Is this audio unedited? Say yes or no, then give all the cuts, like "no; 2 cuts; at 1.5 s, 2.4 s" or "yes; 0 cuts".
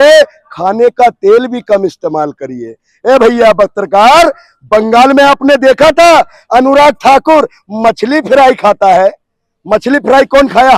yes; 0 cuts